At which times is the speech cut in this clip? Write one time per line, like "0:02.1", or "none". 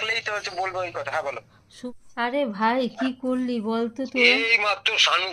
0:01.9